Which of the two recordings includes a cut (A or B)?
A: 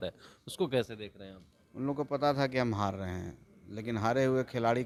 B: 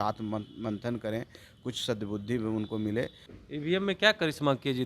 B